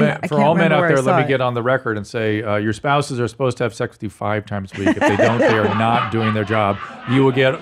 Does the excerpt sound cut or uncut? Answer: uncut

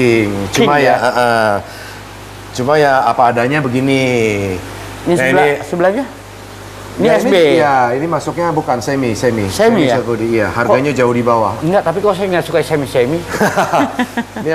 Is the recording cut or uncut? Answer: uncut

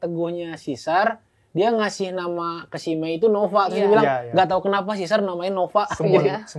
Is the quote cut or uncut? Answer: uncut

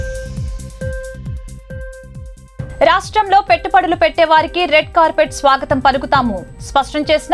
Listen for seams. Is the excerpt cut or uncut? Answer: cut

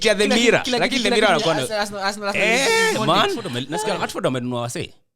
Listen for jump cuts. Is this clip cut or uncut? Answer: cut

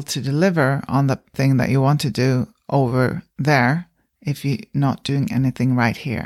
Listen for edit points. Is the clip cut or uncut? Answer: cut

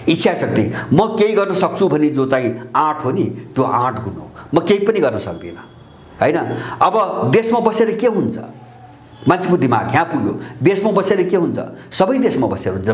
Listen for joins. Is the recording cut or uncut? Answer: uncut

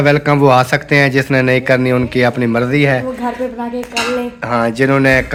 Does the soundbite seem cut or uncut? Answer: uncut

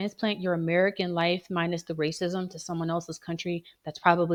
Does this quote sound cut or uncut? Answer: uncut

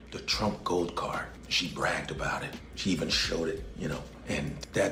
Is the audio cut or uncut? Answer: uncut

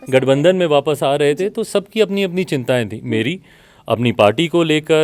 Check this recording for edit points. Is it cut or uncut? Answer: uncut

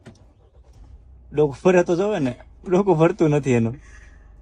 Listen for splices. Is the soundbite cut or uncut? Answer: uncut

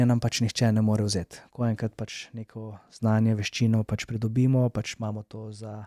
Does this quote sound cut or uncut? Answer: uncut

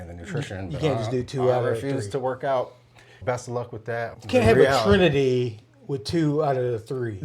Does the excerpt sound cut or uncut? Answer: cut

